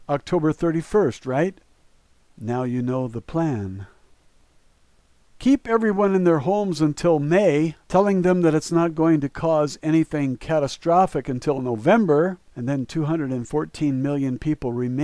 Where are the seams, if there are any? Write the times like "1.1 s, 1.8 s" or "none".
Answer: none

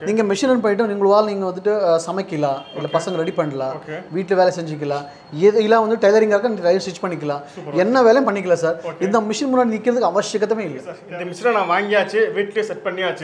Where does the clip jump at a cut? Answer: 11.0 s

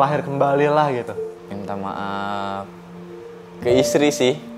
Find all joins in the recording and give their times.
1.2 s

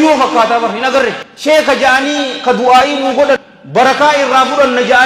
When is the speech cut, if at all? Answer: 1.2 s, 3.5 s

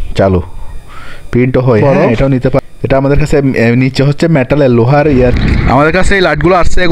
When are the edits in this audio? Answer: 2.6 s, 5.3 s

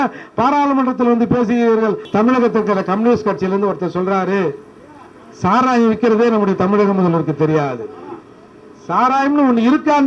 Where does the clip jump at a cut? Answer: 2.0 s

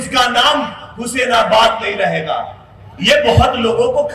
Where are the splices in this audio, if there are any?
none

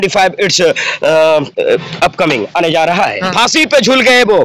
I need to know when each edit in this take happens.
3.3 s

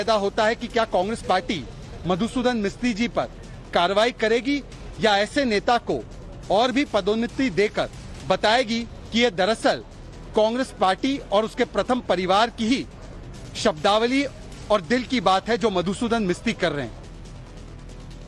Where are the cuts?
none

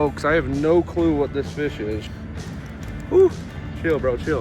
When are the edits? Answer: 2.0 s

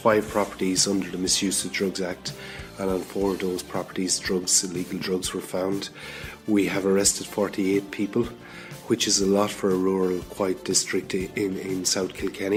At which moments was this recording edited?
none

